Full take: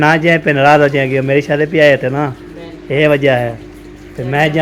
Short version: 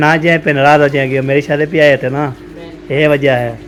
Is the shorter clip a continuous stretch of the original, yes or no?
yes